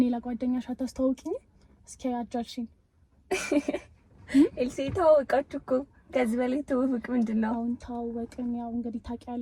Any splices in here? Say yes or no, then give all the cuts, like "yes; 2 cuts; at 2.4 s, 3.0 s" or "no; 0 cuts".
no; 0 cuts